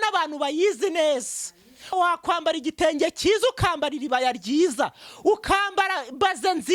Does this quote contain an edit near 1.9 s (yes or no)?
yes